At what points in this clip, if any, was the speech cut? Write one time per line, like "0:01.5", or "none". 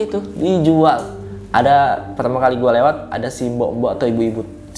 0:01.3